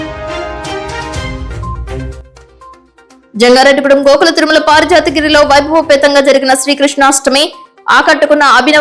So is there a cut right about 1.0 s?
yes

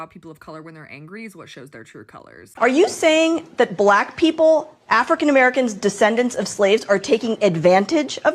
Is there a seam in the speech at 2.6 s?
yes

